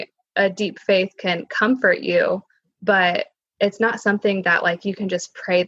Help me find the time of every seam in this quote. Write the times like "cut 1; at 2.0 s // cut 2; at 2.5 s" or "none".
none